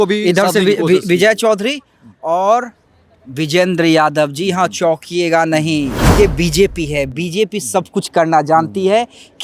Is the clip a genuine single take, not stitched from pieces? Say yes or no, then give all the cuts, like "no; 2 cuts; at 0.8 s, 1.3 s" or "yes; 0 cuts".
no; 1 cut; at 6.0 s